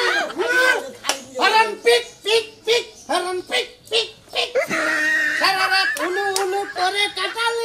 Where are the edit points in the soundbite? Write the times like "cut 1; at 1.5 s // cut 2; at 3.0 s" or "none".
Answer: none